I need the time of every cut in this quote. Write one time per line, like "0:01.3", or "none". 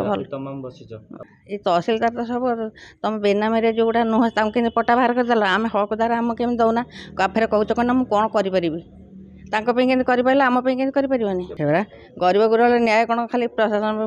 0:01.2
0:11.5